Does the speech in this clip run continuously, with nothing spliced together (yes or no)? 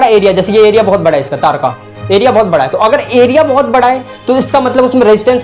yes